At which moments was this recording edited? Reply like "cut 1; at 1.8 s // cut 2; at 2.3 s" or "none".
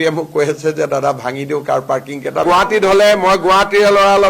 cut 1; at 2.4 s